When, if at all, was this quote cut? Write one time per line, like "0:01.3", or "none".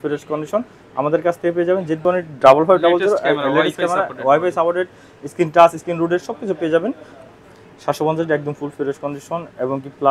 0:01.9
0:07.2